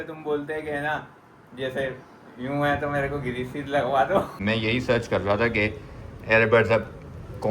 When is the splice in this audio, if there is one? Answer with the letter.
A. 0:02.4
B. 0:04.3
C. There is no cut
B